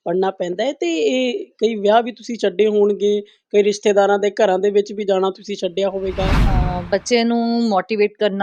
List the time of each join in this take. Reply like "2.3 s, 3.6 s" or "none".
6.4 s